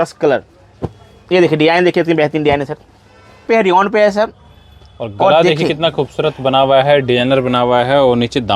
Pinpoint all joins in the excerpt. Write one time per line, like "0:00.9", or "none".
0:03.5